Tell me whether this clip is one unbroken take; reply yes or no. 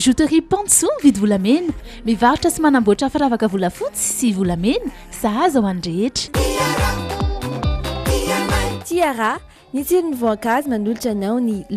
yes